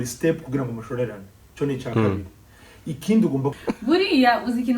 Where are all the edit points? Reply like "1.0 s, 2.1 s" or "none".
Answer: 3.6 s